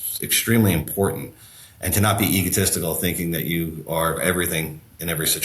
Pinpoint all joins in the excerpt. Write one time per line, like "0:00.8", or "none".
0:04.2